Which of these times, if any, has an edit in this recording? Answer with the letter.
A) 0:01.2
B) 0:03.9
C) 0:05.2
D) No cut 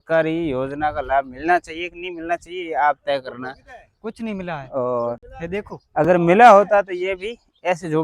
D